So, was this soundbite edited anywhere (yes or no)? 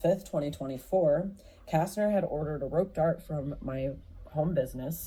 no